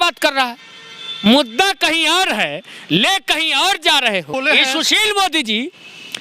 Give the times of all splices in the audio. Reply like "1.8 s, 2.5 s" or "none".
4.3 s